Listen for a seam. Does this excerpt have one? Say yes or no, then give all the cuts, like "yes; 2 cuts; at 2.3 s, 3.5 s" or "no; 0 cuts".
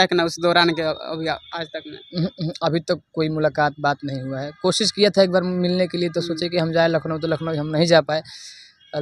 no; 0 cuts